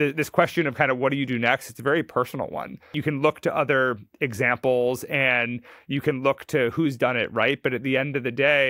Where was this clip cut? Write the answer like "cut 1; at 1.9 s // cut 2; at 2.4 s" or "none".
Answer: cut 1; at 2.9 s